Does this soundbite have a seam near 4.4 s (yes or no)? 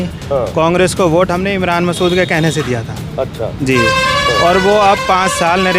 no